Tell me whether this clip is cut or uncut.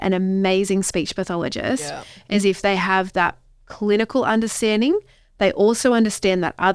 uncut